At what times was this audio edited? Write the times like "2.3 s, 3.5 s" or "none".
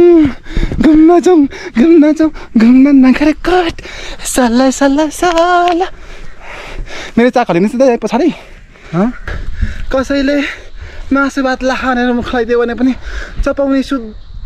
9.2 s